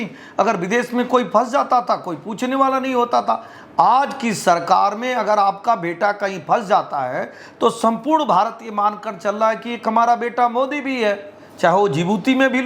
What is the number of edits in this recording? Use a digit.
0